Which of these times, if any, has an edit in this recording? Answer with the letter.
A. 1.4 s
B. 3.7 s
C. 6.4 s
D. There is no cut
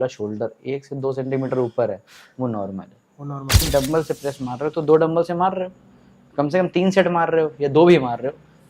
B